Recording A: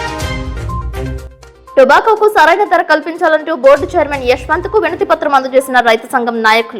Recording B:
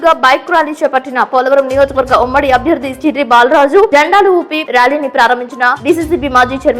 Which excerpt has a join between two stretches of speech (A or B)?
A